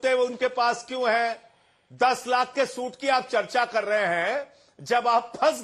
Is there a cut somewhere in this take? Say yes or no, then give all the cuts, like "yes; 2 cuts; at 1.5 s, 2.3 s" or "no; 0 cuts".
yes; 1 cut; at 1.8 s